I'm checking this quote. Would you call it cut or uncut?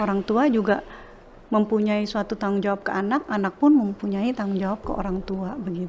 uncut